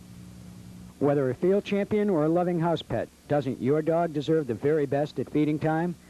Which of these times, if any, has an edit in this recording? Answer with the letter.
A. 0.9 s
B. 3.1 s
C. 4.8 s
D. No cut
A